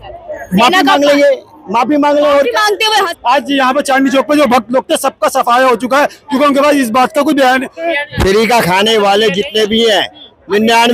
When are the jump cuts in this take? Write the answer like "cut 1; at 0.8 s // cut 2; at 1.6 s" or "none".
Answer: cut 1; at 3.1 s // cut 2; at 7.9 s

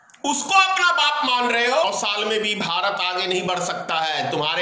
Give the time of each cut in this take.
cut 1; at 1.8 s

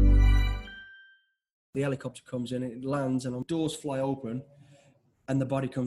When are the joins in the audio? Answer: cut 1; at 1.7 s // cut 2; at 3.4 s

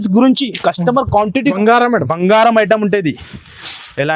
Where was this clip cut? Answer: cut 1; at 1.5 s

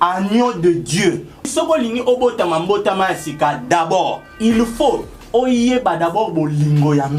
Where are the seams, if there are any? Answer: cut 1; at 1.5 s // cut 2; at 4.3 s

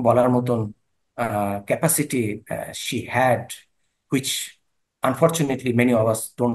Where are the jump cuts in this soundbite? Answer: none

